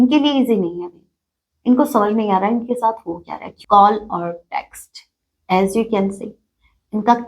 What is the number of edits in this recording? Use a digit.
1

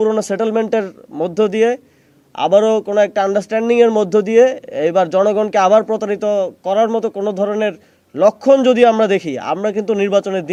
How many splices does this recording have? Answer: 0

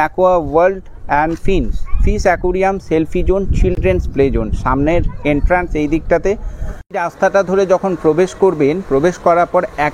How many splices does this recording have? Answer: 0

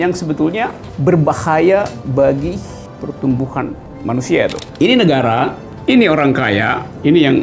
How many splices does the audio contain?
1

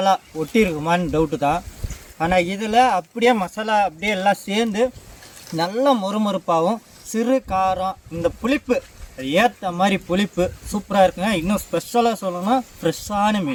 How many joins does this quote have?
0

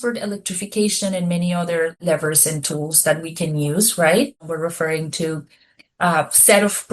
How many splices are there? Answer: 2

